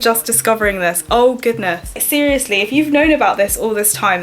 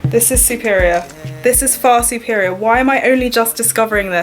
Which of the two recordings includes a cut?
first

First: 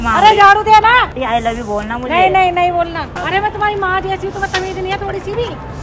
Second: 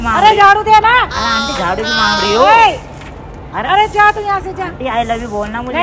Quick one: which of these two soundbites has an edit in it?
first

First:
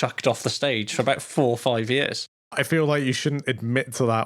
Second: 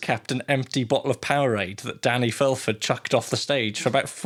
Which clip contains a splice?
first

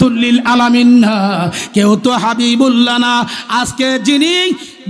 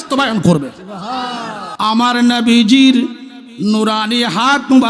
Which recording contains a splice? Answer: second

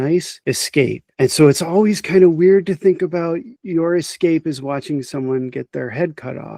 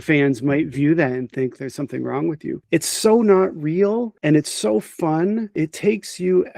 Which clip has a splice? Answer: second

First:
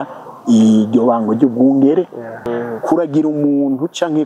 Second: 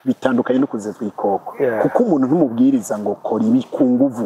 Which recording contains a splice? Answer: first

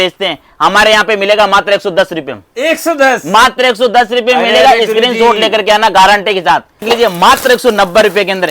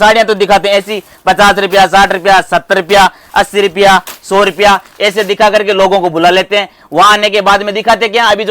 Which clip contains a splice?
first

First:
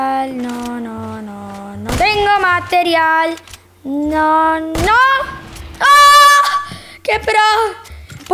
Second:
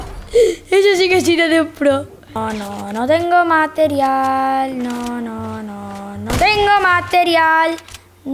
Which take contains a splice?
second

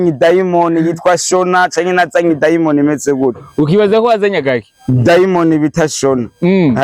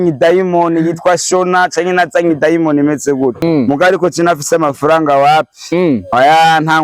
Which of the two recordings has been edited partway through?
second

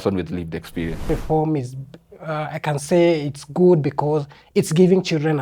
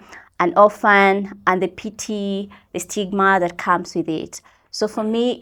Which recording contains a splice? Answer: first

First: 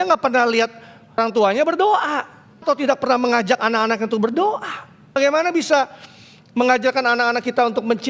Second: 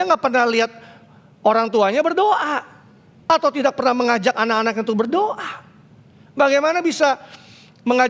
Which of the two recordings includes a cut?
first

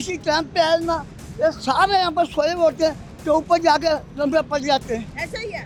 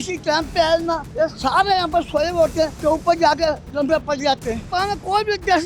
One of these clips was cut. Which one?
second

